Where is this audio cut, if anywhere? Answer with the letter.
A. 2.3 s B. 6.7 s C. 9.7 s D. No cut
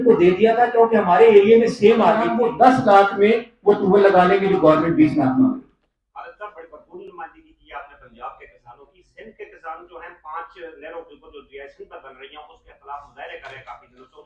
A